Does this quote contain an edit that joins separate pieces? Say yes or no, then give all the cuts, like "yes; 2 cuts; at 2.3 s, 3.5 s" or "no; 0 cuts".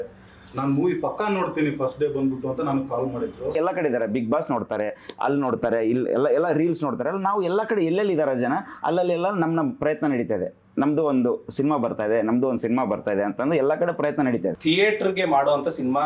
yes; 2 cuts; at 3.5 s, 14.6 s